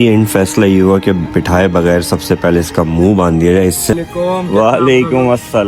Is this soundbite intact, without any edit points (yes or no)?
no